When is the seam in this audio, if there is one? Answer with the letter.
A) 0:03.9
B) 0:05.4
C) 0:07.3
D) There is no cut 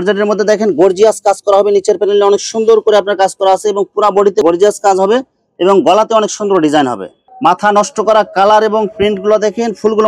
C